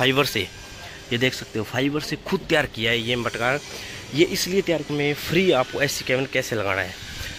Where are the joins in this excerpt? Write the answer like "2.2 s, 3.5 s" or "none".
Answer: 4.9 s